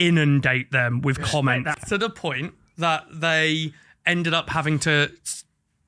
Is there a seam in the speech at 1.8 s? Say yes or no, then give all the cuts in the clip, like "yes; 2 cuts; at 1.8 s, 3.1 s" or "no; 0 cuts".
yes; 1 cut; at 1.8 s